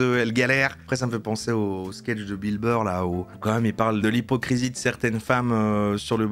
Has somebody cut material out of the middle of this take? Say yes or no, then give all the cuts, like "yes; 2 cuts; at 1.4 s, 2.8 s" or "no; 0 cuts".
yes; 2 cuts; at 0.8 s, 4.0 s